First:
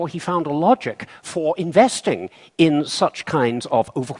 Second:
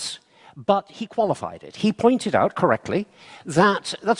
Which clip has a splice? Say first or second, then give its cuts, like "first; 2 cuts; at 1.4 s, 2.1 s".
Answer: second; 1 cut; at 1.2 s